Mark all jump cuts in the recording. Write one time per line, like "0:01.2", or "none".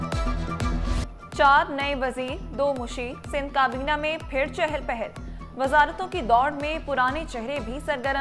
0:01.0